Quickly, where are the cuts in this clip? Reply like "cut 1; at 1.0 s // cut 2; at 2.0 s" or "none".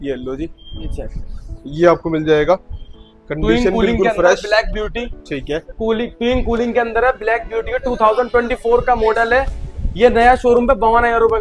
none